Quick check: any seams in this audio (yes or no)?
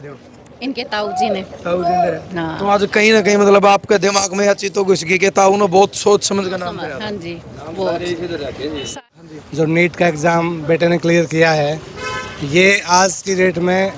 yes